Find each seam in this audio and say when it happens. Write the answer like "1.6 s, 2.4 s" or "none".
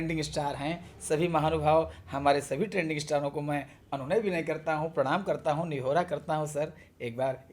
none